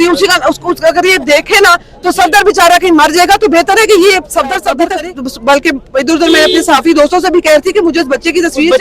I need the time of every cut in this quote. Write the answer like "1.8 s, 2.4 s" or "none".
4.9 s